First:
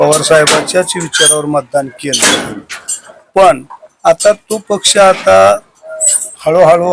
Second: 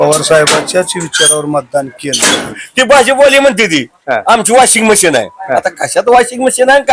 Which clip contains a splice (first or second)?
second